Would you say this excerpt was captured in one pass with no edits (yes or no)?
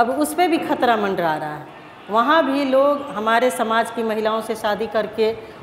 yes